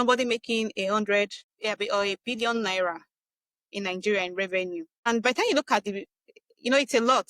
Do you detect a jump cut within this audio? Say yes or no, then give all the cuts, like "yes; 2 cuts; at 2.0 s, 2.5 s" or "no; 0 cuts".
yes; 1 cut; at 5.1 s